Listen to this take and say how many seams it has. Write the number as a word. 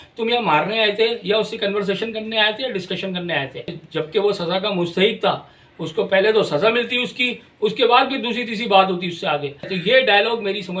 two